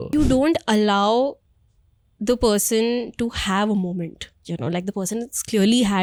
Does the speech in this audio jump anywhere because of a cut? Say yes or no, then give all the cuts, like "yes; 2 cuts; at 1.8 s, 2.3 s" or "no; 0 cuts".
no; 0 cuts